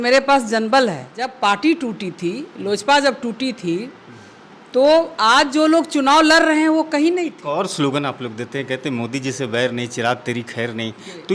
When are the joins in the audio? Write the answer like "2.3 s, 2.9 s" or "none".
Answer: 1.3 s, 7.4 s